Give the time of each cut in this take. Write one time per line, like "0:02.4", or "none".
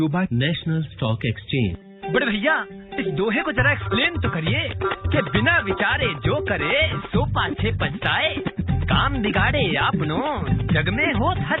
0:01.9